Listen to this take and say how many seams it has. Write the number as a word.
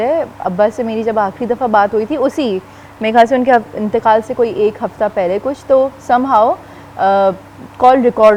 zero